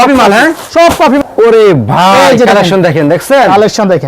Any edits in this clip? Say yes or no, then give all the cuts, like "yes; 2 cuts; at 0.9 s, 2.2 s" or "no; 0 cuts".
yes; 1 cut; at 1.2 s